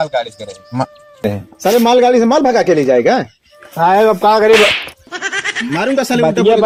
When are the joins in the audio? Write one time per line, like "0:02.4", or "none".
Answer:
none